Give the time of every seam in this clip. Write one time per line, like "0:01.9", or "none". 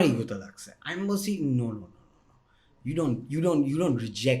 none